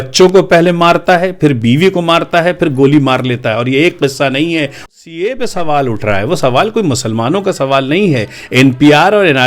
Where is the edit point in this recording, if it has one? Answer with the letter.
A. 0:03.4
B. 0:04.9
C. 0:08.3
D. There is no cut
B